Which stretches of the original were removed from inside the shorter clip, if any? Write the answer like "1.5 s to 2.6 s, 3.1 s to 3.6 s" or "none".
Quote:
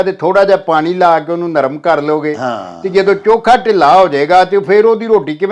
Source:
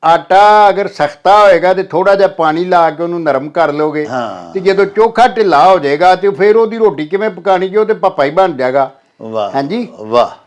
none